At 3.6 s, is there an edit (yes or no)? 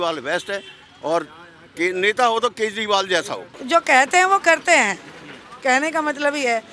yes